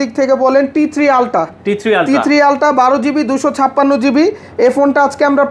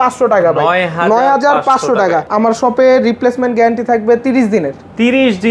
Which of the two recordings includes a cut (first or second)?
second